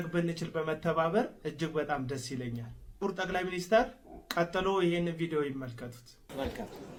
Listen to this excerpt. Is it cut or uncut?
uncut